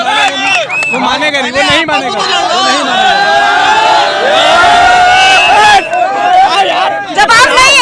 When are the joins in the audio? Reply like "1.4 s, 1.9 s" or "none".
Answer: none